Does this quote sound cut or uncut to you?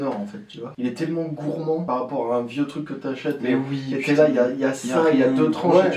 uncut